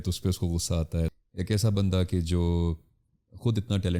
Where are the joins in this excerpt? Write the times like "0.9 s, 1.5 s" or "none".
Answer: 1.1 s